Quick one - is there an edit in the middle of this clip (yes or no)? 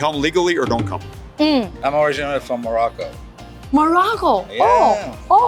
no